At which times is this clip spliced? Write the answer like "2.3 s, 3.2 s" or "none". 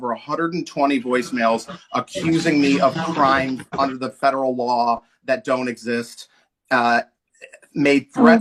none